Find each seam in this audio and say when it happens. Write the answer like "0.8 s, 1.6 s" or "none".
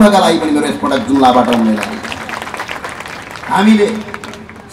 none